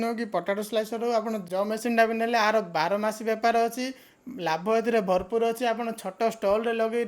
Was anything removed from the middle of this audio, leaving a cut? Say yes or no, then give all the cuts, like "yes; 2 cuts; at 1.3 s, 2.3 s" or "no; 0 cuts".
yes; 1 cut; at 1.4 s